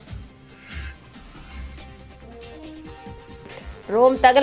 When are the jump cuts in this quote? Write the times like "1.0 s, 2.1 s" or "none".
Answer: 1.8 s, 3.3 s